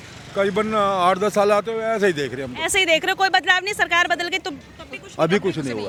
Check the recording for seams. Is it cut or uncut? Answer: uncut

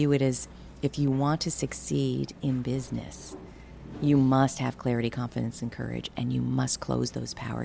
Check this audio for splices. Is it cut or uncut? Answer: uncut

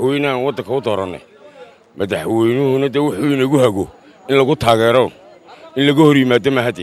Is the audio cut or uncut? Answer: uncut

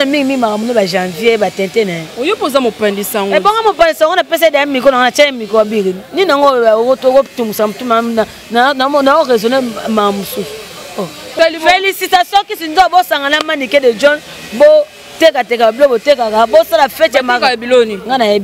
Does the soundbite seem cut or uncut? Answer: cut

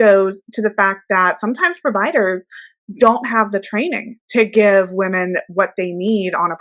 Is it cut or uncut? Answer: uncut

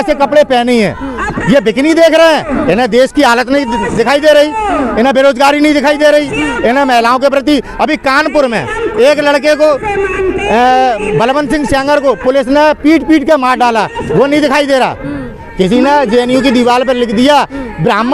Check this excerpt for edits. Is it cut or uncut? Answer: uncut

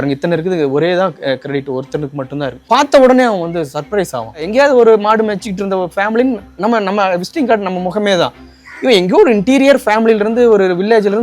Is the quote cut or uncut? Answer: cut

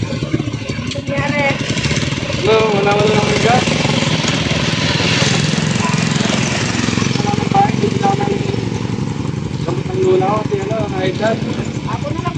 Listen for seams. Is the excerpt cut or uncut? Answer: uncut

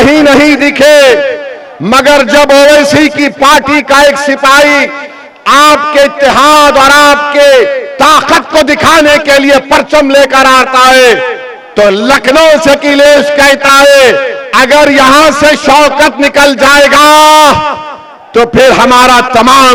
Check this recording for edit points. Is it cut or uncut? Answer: uncut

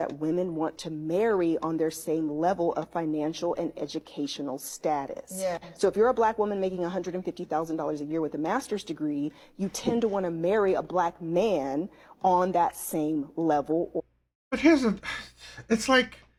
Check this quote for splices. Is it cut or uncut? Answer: uncut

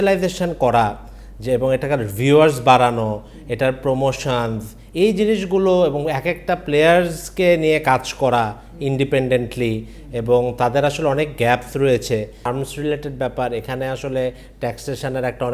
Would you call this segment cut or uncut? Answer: cut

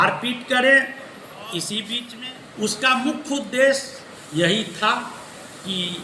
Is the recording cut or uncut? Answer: cut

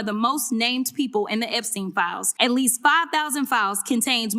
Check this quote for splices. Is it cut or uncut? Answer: cut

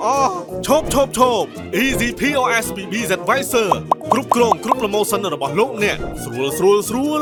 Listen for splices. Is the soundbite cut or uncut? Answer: uncut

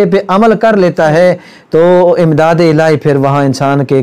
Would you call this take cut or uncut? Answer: uncut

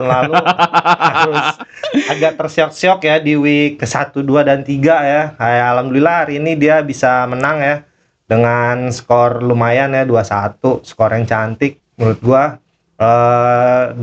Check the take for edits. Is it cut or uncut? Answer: uncut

